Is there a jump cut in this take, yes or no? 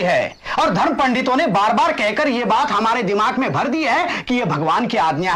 no